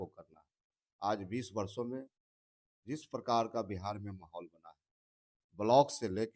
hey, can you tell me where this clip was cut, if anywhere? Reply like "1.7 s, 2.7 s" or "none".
none